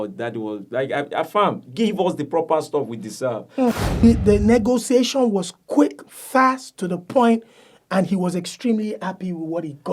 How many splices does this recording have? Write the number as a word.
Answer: one